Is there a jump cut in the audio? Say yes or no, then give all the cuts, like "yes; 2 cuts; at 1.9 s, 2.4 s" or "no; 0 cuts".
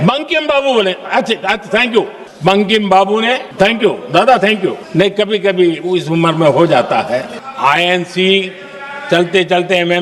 yes; 4 cuts; at 2.2 s, 3.5 s, 4.8 s, 7.4 s